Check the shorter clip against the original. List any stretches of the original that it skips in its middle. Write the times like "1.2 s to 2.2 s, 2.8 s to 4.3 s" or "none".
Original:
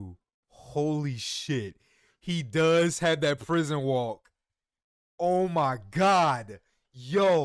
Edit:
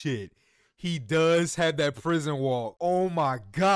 4.2 s to 5.1 s